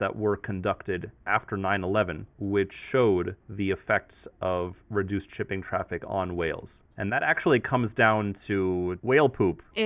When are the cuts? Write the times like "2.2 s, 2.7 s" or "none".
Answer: 1.1 s, 2.3 s, 3.4 s

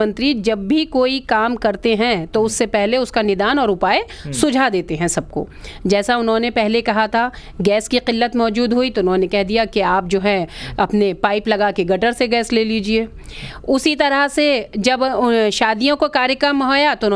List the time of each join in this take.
none

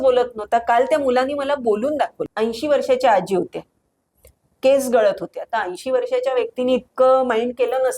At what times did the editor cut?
2.2 s

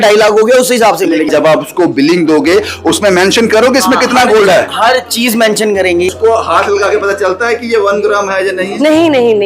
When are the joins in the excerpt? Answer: 1.3 s, 6.1 s

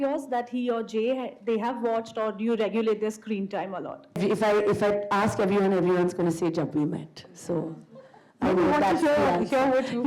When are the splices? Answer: 4.2 s

